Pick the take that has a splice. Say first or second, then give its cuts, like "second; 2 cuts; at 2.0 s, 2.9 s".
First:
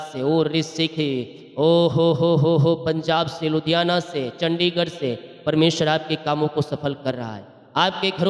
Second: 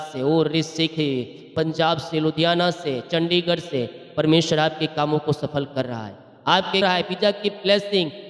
second; 2 cuts; at 1.5 s, 6.8 s